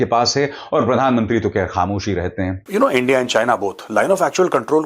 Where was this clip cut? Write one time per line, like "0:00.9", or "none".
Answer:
0:02.6

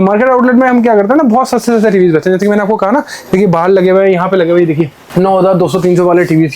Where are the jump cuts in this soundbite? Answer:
none

